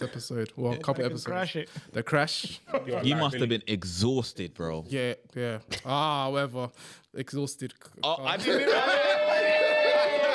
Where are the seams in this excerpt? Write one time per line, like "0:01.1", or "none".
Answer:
0:02.6